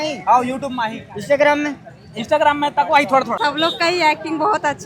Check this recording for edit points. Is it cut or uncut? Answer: cut